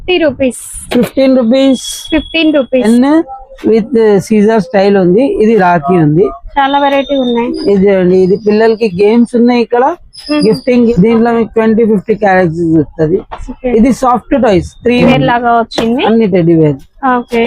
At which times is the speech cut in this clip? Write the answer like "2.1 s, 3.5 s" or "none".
2.8 s, 10.9 s, 15.1 s